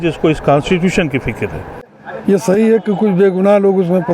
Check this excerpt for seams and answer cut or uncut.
cut